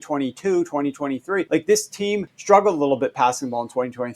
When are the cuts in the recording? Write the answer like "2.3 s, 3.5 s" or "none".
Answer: 1.5 s, 2.3 s